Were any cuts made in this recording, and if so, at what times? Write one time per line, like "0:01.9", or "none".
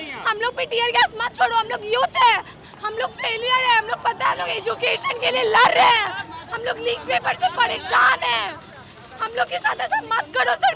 none